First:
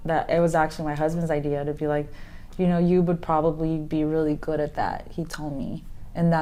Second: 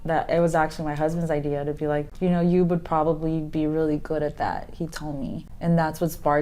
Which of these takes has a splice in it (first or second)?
second